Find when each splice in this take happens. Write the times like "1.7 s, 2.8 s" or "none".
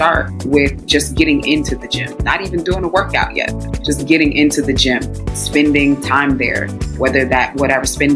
none